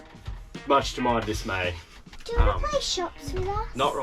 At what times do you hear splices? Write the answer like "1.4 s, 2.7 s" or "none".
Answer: 2.1 s